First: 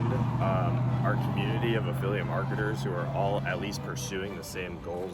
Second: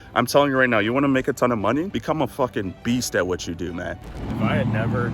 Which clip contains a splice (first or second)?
second